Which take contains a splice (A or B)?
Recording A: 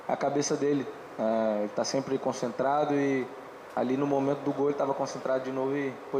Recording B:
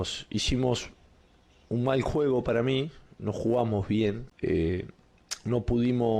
B